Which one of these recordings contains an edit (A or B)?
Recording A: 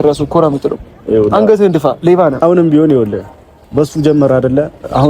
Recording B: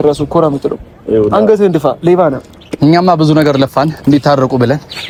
A